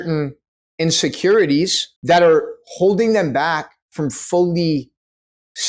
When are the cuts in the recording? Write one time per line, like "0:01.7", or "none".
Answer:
0:01.9